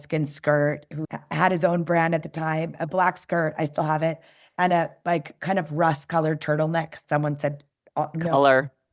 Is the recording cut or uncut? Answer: uncut